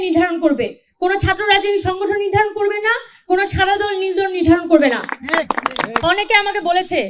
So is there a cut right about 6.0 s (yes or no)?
yes